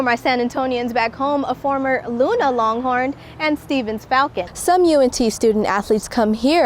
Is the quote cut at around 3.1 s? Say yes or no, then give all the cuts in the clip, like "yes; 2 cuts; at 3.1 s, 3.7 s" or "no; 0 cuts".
no; 1 cut; at 4.5 s